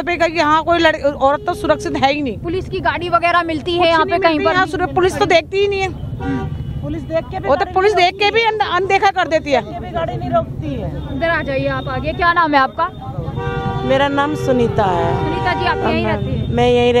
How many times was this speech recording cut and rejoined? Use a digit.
0